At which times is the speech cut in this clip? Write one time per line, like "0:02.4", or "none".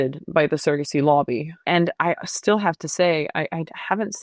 0:01.5